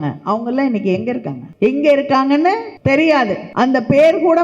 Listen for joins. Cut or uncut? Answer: cut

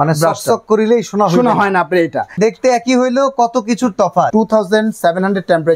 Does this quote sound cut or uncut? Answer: cut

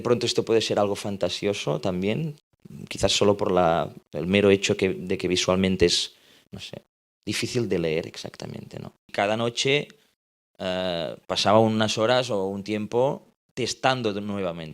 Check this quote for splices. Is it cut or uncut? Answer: cut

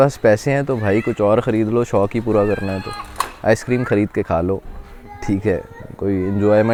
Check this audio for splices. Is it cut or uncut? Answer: uncut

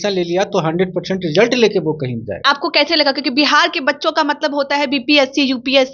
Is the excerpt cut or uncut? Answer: cut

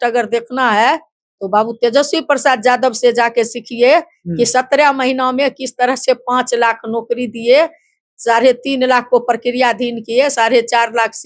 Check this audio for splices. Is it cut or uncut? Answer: uncut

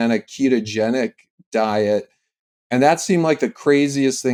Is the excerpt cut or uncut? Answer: uncut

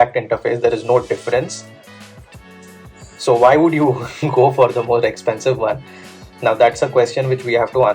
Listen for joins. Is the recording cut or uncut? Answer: cut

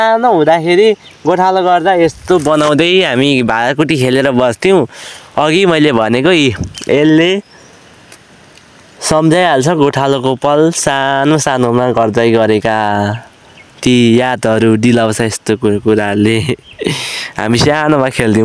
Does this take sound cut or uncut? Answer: uncut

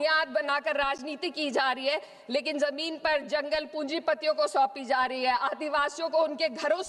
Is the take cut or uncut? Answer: uncut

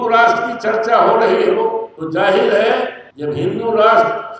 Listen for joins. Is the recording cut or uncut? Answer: uncut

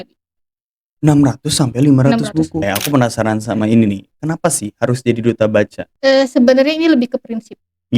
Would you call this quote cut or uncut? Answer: cut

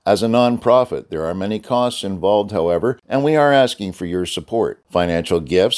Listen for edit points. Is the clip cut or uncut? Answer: cut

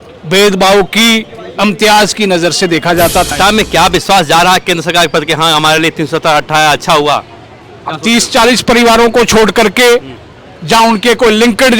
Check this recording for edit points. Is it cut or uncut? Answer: cut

